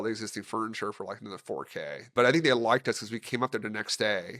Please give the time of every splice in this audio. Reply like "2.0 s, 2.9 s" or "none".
2.1 s